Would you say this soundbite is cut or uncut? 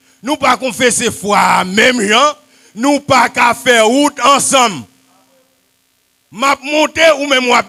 uncut